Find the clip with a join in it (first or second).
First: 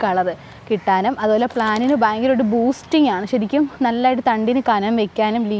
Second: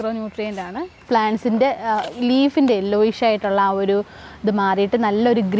second